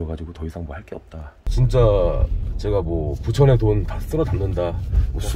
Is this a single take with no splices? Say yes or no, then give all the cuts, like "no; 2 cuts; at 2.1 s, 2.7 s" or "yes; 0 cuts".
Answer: no; 1 cut; at 1.5 s